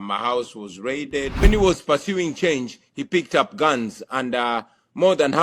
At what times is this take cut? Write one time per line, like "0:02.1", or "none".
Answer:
0:01.4

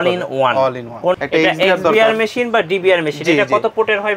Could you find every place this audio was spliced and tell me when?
0:01.1

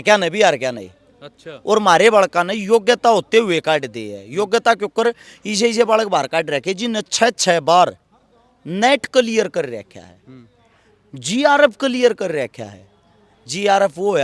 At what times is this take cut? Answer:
none

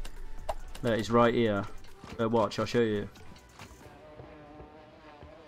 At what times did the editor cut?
0:03.8

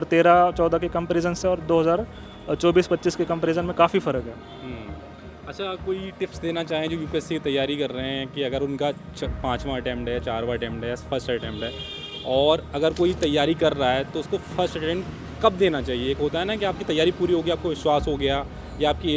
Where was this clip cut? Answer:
none

